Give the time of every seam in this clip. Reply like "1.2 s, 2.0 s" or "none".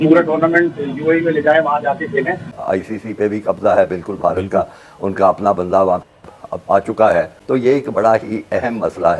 2.5 s